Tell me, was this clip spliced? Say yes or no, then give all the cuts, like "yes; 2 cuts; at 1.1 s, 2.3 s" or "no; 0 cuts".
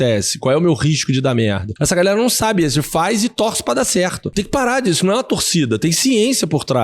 yes; 2 cuts; at 1.7 s, 4.2 s